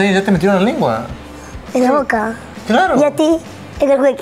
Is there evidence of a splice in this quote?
no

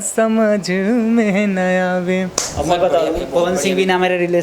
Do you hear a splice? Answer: no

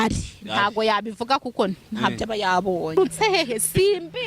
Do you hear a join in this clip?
yes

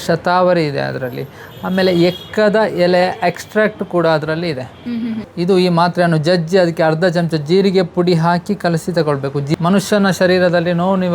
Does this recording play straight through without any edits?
no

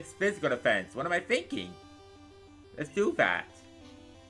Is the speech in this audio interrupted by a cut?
no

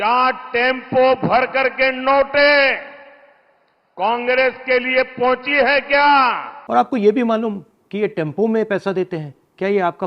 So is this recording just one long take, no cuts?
no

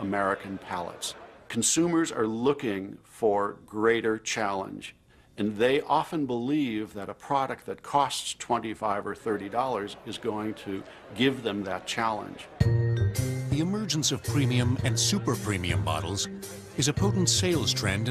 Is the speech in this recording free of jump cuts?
no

